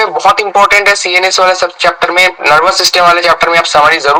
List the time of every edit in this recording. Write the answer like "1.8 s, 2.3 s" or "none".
none